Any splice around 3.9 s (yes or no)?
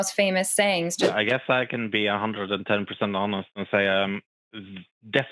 no